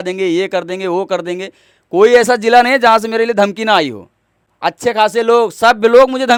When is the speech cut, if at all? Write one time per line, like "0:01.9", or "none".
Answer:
none